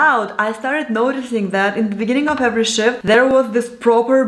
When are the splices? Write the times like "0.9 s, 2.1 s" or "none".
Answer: none